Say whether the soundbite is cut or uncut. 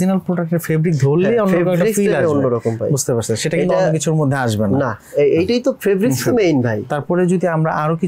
uncut